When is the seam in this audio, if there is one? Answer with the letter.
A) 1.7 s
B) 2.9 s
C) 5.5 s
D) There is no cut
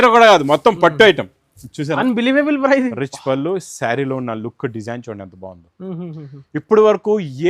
B